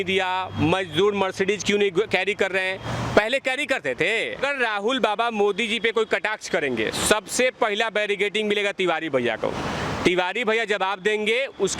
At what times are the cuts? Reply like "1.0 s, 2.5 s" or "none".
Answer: 4.4 s